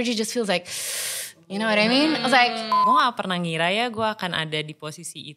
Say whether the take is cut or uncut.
cut